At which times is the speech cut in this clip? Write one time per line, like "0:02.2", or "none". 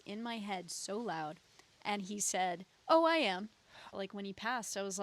0:03.9